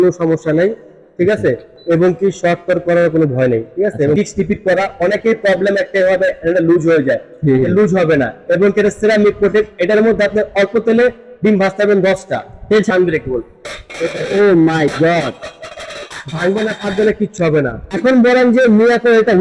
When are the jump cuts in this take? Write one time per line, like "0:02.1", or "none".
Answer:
0:04.2
0:12.9
0:17.8